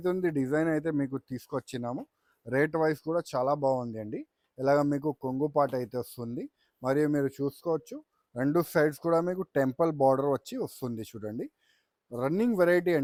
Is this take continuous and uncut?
yes; 0 cuts

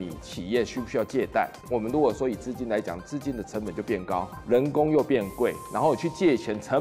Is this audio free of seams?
no; 2 cuts; at 1.6 s, 4.3 s

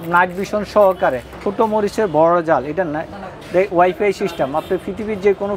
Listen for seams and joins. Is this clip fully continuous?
no; 1 cut; at 1.4 s

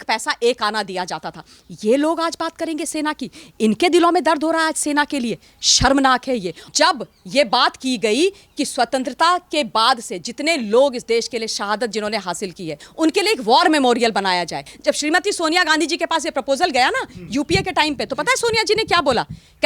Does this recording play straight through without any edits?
no; 3 cuts; at 6.6 s, 12.8 s, 14.6 s

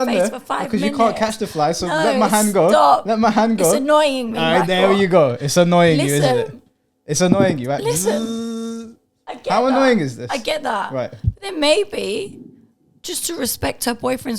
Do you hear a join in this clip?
no; 0 cuts

